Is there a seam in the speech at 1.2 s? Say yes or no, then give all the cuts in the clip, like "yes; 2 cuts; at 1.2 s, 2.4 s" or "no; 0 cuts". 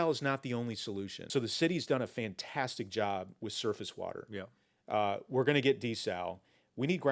yes; 1 cut; at 1.2 s